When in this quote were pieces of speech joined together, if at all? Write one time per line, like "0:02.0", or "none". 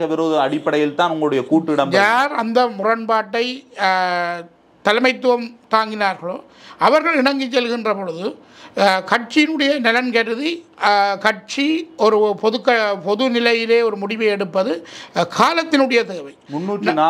none